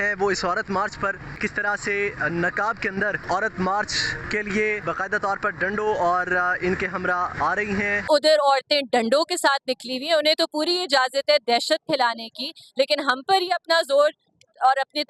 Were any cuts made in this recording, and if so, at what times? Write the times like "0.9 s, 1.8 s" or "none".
1.4 s, 3.2 s, 4.1 s, 4.8 s, 7.7 s

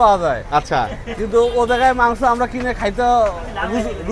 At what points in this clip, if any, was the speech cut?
none

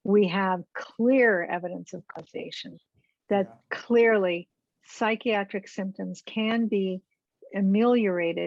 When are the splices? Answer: none

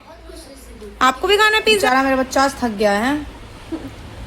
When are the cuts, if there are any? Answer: 1.9 s

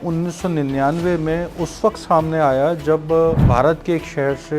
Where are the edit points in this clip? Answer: 3.4 s

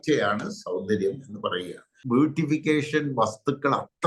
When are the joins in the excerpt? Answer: 1.9 s

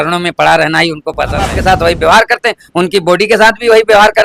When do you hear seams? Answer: 1.6 s

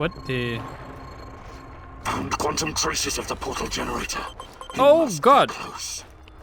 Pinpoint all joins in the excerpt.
none

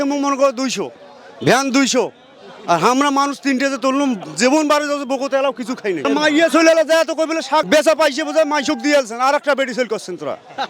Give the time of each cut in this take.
6.0 s, 7.7 s

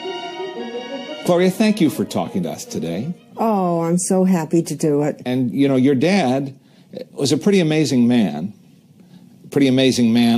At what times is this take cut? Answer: 2.5 s

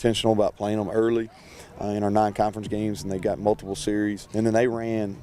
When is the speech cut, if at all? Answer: 4.2 s

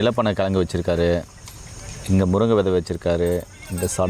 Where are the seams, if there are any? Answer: none

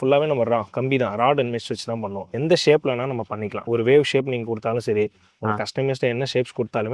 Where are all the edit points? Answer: 2.2 s, 3.6 s

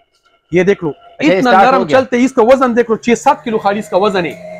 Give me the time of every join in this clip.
none

